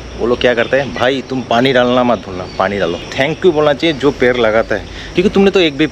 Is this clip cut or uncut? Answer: cut